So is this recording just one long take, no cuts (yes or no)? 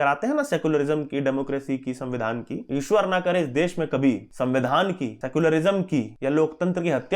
no